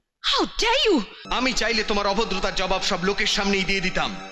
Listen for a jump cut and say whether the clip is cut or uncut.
cut